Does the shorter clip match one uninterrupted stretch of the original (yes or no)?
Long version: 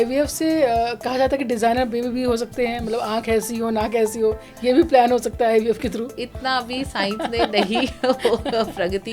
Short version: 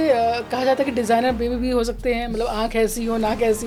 yes